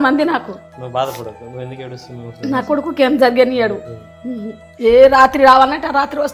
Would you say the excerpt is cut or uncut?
uncut